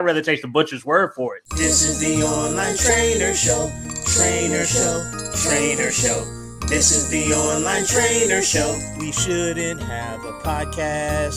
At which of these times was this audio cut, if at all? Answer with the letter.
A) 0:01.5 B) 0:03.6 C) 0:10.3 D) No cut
A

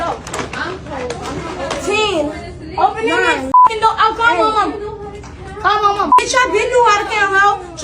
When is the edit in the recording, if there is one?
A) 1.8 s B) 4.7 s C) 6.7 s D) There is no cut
B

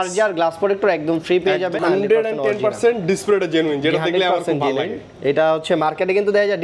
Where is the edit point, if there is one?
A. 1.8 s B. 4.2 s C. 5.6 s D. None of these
A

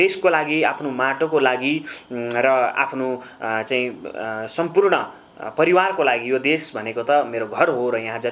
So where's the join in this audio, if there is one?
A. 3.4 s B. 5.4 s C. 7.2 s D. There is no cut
D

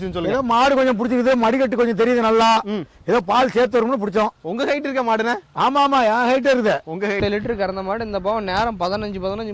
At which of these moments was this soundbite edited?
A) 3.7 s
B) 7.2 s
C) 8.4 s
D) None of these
B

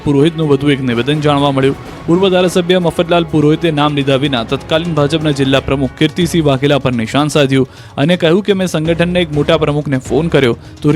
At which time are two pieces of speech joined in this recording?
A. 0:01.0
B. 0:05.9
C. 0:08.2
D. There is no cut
C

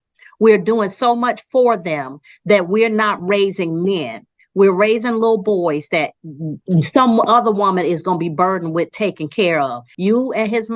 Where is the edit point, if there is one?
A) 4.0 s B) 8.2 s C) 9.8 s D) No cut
C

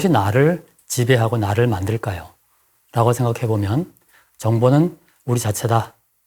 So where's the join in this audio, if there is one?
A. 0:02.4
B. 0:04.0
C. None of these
B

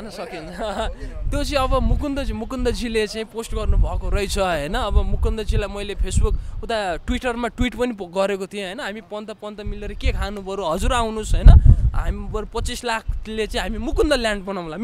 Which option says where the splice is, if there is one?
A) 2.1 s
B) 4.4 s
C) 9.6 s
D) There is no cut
D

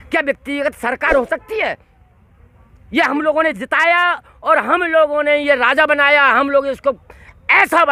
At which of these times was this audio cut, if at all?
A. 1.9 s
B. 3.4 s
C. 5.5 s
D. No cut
D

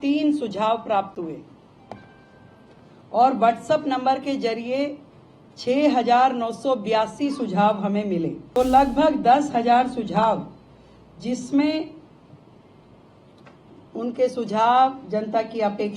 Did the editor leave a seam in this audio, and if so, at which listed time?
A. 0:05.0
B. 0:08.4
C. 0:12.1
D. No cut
B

